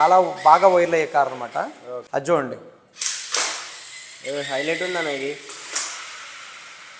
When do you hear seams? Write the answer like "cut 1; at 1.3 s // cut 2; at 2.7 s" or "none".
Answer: cut 1; at 1.9 s